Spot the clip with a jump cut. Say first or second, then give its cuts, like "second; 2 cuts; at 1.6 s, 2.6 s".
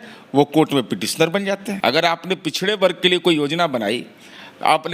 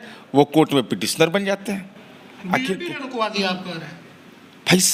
first; 1 cut; at 1.8 s